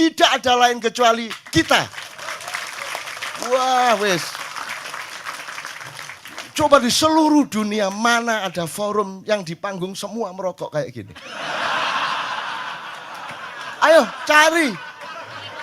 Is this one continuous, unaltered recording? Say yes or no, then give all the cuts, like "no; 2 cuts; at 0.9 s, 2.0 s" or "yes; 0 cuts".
yes; 0 cuts